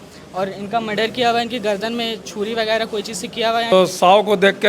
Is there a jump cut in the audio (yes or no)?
yes